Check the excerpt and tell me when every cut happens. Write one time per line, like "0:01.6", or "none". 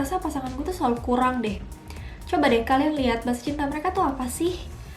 none